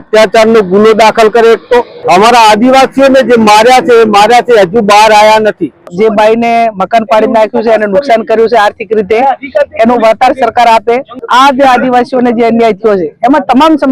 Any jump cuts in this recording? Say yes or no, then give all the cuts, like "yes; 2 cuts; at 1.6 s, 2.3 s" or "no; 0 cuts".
yes; 3 cuts; at 1.9 s, 5.9 s, 11.1 s